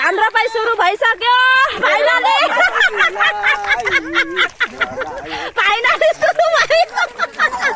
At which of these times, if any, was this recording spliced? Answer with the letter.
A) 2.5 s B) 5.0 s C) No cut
C